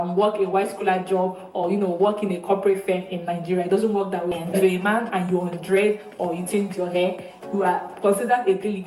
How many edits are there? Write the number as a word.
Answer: one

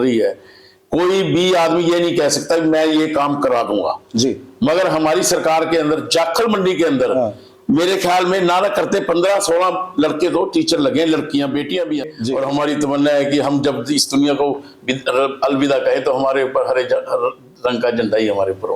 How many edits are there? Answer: one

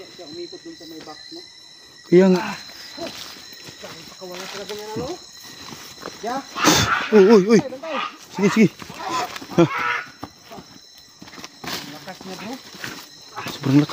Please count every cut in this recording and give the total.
one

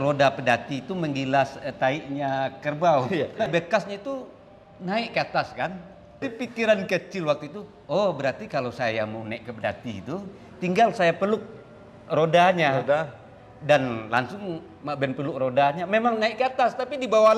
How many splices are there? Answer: two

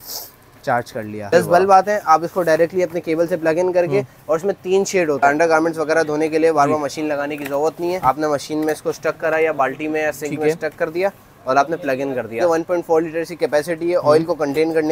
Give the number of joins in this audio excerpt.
four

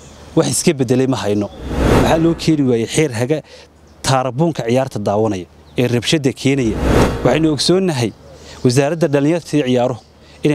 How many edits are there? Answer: two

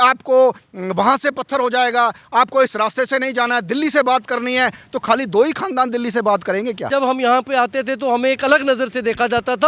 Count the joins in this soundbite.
one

